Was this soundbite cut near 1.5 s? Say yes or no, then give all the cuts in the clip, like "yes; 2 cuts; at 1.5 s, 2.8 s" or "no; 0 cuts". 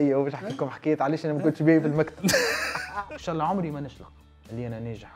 no; 1 cut; at 2.7 s